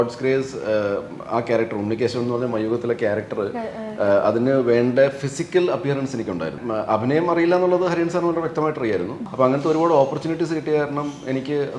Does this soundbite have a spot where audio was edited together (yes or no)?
yes